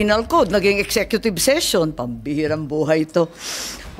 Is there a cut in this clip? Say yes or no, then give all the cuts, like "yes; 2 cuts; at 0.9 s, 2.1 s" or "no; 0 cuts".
no; 0 cuts